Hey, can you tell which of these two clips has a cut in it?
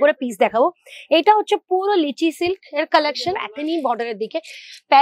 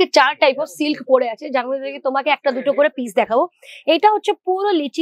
first; 1 cut; at 3.5 s

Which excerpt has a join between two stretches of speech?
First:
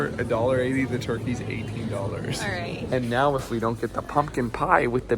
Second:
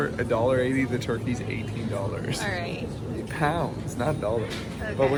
first; 1 cut; at 2.8 s

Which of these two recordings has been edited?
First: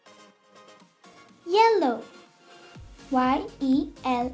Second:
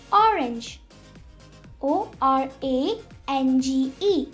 first; 1 cut; at 1.4 s

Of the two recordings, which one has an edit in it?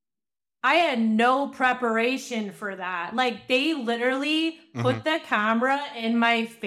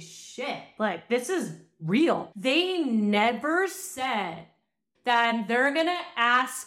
second; 2 cuts; at 2.3 s, 4.8 s

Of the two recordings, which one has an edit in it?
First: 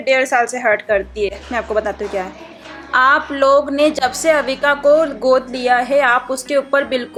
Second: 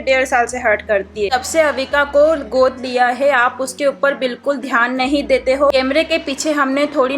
second; 2 cuts; at 1.3 s, 5.7 s

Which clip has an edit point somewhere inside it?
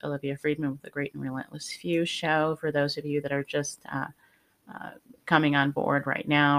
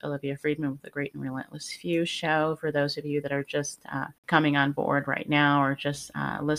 second; 1 cut; at 4.2 s

